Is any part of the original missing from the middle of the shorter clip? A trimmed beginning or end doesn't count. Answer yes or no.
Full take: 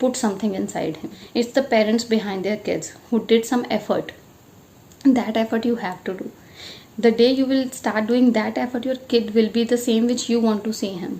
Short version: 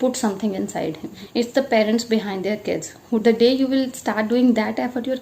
yes